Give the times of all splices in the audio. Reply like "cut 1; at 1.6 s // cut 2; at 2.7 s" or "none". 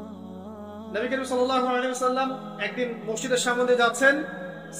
cut 1; at 0.9 s